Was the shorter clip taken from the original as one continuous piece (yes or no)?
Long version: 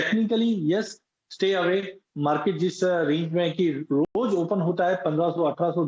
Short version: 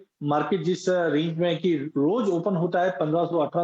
no